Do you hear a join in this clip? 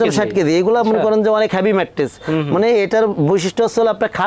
no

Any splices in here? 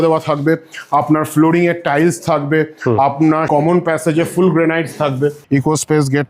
yes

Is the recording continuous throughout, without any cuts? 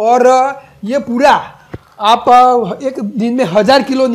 yes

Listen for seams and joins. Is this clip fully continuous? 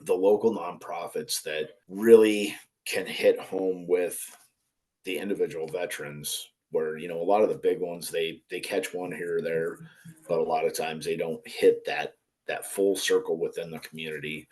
no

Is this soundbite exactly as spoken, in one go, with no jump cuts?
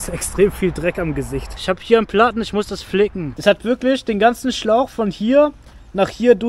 no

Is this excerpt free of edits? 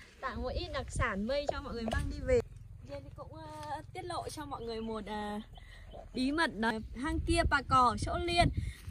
no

